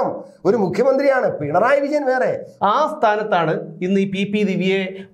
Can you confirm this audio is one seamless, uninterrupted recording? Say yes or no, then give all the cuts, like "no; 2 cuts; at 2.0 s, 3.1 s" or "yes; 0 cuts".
no; 1 cut; at 2.5 s